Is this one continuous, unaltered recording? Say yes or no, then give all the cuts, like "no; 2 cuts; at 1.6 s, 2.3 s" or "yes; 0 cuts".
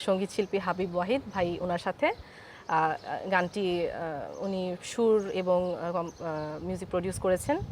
yes; 0 cuts